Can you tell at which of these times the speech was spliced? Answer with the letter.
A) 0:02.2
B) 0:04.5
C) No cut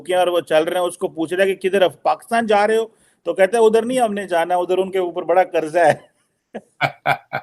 C